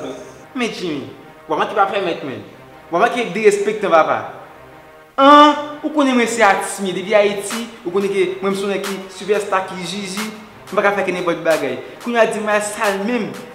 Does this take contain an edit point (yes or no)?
no